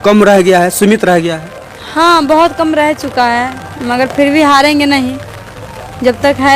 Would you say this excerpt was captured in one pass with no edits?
yes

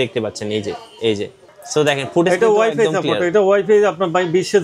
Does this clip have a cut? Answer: no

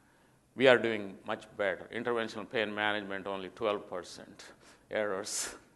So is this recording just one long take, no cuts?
no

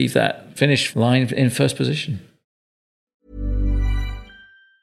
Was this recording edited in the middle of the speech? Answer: yes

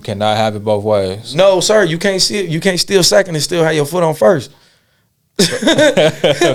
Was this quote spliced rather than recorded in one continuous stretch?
no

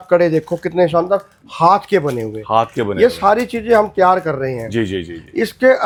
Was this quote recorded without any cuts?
yes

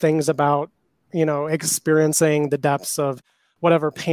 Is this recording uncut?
yes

